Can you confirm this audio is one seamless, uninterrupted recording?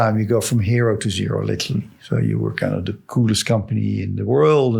no; 1 cut; at 3.0 s

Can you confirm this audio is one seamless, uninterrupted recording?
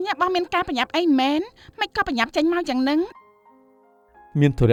yes; 0 cuts

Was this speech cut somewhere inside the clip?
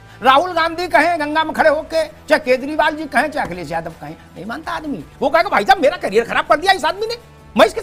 no; 0 cuts

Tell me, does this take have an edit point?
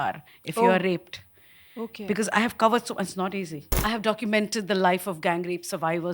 yes; 1 cut; at 3.7 s

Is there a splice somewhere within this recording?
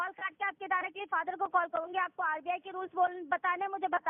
no; 0 cuts

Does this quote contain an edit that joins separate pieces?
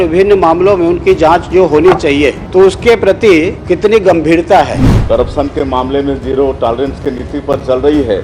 yes; 3 cuts; at 2.4 s, 3.6 s, 4.9 s

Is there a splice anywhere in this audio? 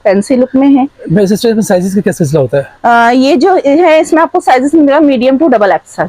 no; 0 cuts

